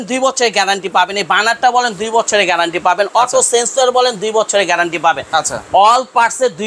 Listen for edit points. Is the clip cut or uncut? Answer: uncut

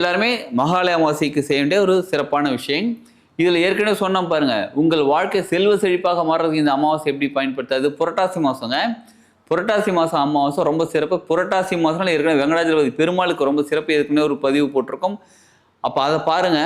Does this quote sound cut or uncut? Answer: uncut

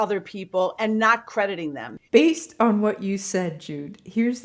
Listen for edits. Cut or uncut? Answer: cut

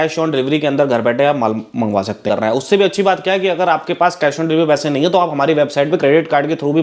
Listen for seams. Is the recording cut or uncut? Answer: cut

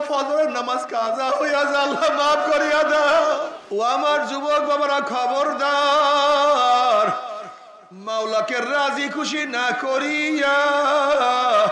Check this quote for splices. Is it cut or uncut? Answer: cut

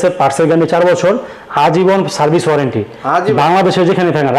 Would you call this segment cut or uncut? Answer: uncut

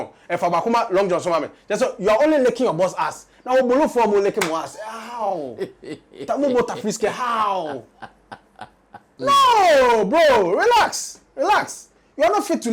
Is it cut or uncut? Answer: cut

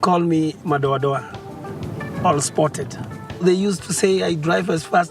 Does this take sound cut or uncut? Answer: cut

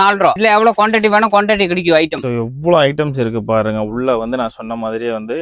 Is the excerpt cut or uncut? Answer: uncut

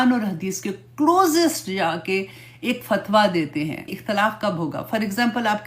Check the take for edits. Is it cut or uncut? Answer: cut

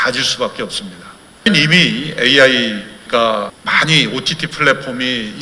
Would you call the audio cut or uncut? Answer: cut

